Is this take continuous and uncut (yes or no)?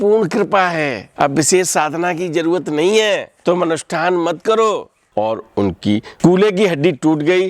no